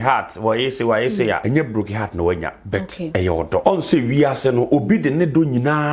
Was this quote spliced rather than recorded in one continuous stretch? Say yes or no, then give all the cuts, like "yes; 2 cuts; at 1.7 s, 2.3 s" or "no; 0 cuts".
yes; 2 cuts; at 1.4 s, 3.6 s